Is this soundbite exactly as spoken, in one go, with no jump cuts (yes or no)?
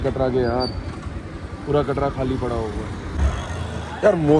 yes